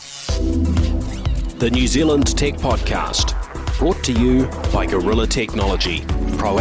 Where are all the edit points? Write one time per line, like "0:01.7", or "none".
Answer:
none